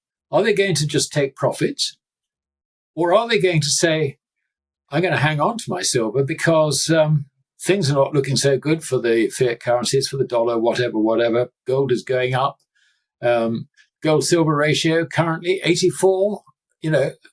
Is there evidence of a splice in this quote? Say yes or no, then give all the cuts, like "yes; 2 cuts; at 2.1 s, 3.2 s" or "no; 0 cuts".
no; 0 cuts